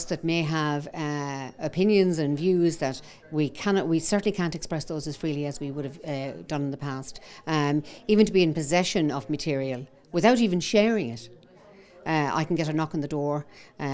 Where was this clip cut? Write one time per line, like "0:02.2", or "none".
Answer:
none